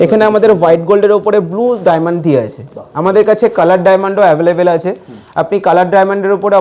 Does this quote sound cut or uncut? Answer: uncut